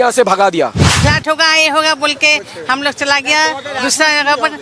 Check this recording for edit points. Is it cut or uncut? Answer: cut